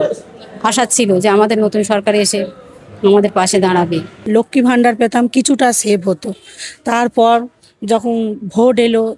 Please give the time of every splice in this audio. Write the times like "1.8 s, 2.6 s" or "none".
4.2 s